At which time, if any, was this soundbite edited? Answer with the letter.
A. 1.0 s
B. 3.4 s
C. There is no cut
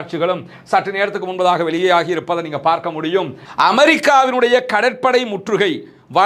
B